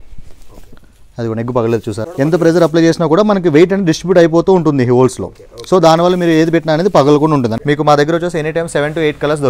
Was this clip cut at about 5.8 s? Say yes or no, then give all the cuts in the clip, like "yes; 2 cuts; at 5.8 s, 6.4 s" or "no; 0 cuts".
no; 2 cuts; at 2.1 s, 7.6 s